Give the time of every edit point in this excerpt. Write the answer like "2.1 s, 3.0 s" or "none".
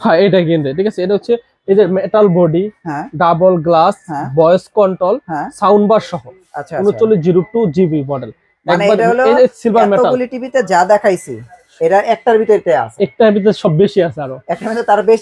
none